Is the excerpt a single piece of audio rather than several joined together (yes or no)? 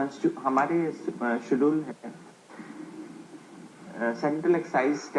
yes